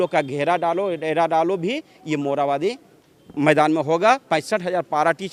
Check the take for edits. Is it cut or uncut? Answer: uncut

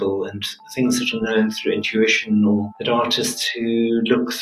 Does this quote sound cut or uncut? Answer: cut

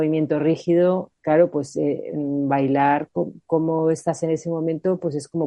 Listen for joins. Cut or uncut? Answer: cut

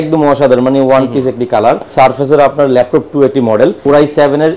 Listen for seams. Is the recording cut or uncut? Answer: cut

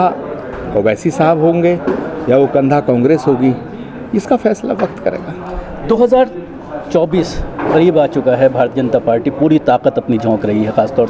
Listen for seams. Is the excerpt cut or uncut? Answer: uncut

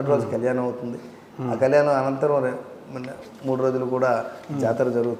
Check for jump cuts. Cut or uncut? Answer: uncut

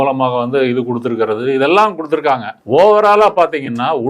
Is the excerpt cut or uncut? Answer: cut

